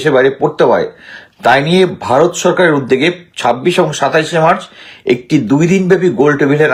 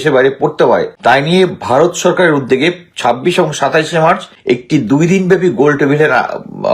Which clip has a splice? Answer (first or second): second